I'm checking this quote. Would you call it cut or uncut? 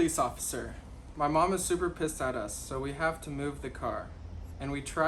uncut